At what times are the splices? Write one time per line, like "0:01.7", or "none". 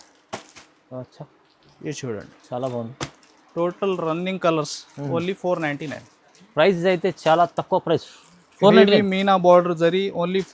none